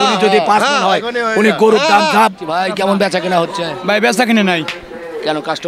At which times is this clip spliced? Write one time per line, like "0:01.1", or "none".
0:02.5